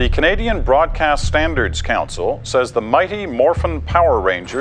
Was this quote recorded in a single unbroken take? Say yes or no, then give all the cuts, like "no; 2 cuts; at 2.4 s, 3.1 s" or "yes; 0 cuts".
yes; 0 cuts